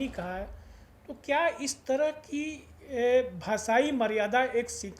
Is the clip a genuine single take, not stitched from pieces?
yes; 0 cuts

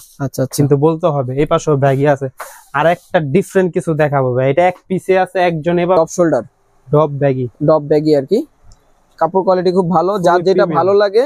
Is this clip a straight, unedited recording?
no; 1 cut; at 6.0 s

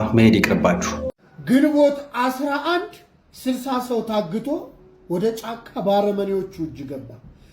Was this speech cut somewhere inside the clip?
yes; 1 cut; at 1.0 s

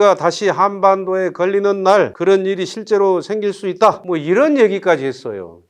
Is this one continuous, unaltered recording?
yes; 0 cuts

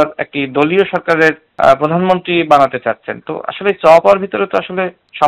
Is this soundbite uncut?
yes; 0 cuts

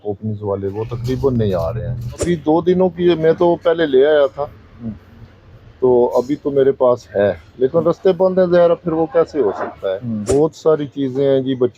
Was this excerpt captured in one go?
no; 2 cuts; at 2.2 s, 10.2 s

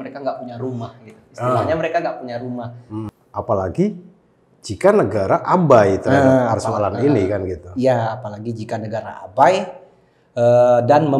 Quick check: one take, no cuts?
no; 1 cut; at 2.8 s

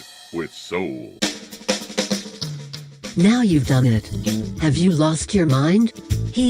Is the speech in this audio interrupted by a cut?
yes; 1 cut; at 1.1 s

